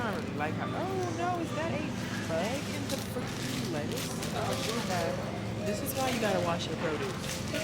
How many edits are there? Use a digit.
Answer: 0